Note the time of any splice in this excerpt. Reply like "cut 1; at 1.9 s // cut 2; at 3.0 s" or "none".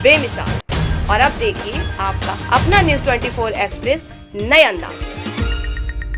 none